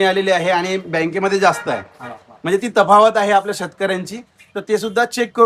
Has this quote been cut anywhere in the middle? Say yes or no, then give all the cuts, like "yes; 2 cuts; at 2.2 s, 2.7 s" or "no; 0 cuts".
no; 0 cuts